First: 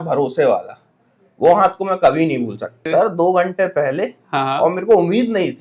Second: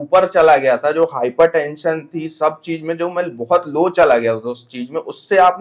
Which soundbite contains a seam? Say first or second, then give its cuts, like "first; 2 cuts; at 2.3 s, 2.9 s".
first; 1 cut; at 2.8 s